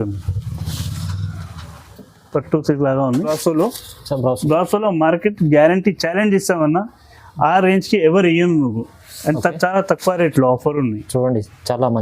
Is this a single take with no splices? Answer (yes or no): no